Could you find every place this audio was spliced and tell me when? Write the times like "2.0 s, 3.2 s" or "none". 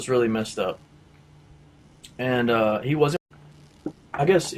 none